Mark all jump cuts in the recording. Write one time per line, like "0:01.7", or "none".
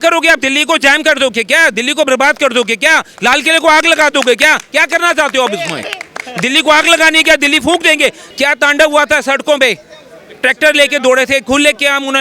0:08.2

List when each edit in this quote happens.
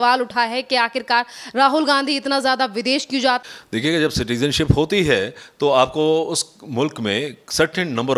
0:03.4

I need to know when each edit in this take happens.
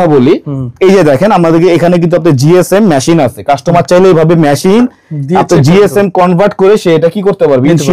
none

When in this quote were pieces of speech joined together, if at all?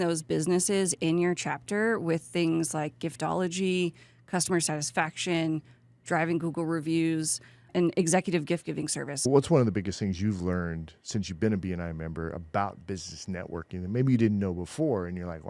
0:09.2

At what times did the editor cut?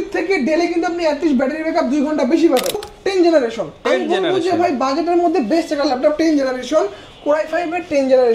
0:02.9

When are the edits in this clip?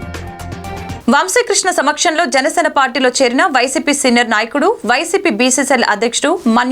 0:01.0

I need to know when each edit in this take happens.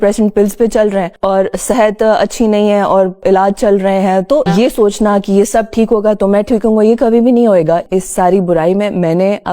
0:04.5
0:07.8

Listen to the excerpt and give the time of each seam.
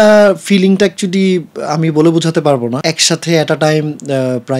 0:02.8

